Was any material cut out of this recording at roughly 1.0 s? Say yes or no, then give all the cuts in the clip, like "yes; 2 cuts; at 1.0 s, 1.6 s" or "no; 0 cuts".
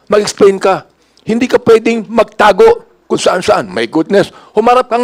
no; 0 cuts